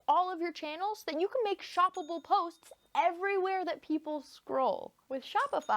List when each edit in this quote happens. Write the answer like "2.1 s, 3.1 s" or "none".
none

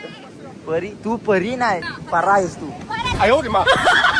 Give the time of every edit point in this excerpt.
1.9 s

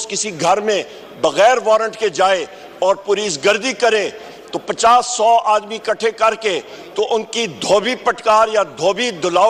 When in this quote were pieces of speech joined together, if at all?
none

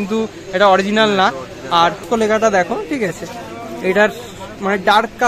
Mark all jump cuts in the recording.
2.0 s

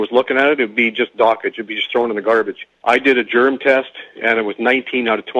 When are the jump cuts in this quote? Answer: 2.7 s

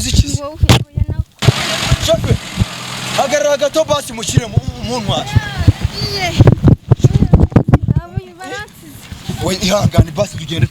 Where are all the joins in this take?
1.4 s

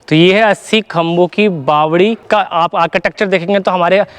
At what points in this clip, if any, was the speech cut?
2.2 s

